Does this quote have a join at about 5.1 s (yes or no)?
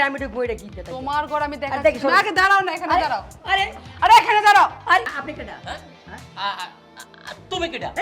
yes